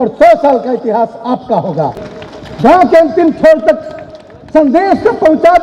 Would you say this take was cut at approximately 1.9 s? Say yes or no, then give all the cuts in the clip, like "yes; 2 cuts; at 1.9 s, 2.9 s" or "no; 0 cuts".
yes; 1 cut; at 1.9 s